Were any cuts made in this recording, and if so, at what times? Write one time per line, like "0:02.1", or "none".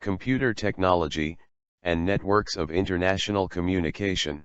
0:02.9